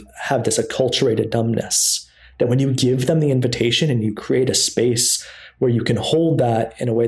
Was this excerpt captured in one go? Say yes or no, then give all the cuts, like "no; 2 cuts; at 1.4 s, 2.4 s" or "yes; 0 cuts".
yes; 0 cuts